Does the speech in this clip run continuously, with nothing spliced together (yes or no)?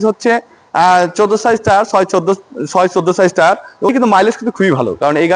no